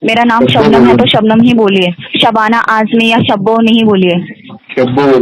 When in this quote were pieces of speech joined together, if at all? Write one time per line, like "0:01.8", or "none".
none